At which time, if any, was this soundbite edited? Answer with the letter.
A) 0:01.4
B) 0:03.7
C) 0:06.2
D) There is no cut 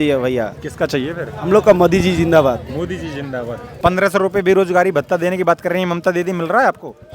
B